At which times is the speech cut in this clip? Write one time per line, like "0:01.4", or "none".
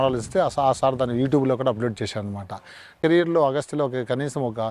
0:03.0